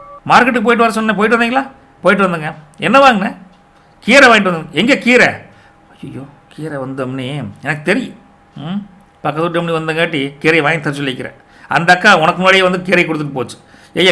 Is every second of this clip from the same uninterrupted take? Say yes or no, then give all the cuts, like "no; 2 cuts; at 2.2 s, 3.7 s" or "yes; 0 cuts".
yes; 0 cuts